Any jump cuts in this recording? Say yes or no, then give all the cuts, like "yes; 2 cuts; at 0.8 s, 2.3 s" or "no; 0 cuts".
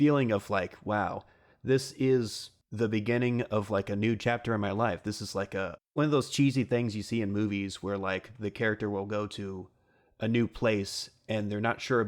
yes; 1 cut; at 5.8 s